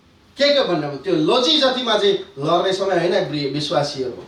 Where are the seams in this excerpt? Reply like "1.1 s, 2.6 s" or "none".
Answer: none